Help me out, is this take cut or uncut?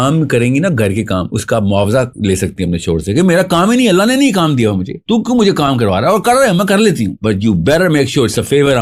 uncut